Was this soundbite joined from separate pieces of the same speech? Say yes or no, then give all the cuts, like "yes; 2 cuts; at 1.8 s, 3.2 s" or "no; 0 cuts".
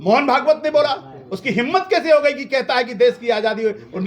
no; 0 cuts